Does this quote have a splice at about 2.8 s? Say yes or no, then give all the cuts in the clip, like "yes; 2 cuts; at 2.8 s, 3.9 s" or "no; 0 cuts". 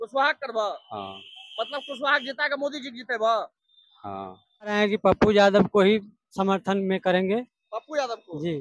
no; 1 cut; at 4.8 s